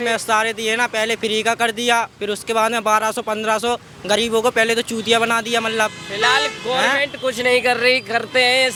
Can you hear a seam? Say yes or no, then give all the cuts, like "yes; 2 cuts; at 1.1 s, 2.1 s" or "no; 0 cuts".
no; 0 cuts